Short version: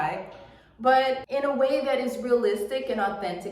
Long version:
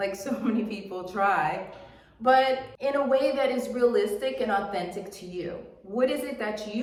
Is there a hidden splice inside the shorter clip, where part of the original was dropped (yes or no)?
yes